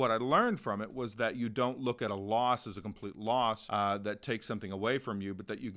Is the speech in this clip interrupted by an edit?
no; 0 cuts

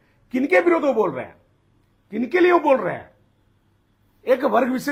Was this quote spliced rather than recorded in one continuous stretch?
no; 0 cuts

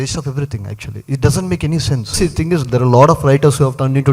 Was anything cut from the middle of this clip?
yes; 1 cut; at 2.1 s

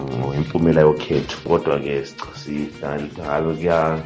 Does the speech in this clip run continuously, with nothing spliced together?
no; 1 cut; at 1.4 s

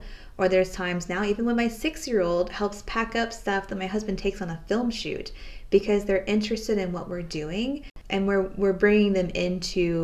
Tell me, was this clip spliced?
yes; 1 cut; at 8.0 s

